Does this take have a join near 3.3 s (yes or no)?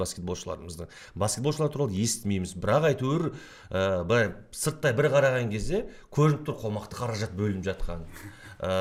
no